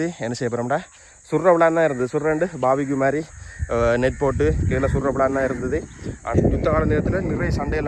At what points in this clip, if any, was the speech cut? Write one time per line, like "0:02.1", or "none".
0:06.4